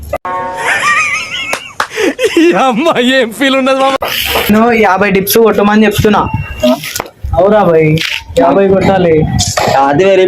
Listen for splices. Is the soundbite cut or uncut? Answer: cut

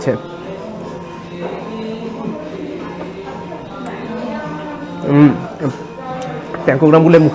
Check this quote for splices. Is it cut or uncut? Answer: uncut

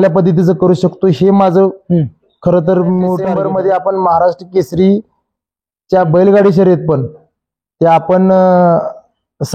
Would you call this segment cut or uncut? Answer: cut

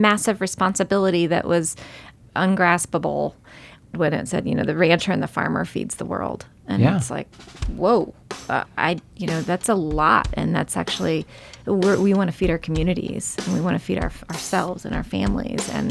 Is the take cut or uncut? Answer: cut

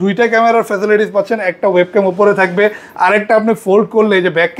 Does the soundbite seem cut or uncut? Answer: uncut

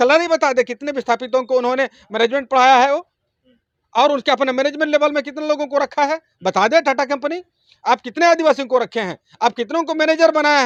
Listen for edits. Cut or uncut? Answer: uncut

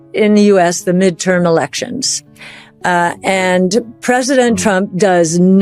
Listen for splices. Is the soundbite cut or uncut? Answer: uncut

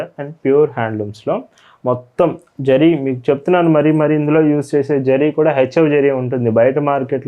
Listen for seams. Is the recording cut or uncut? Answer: uncut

